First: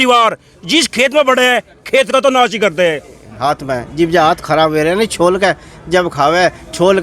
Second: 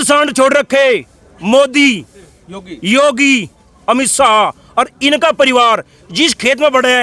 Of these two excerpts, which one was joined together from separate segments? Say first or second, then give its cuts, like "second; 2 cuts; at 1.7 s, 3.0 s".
first; 1 cut; at 3.3 s